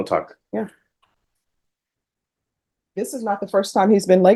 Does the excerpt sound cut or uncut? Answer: uncut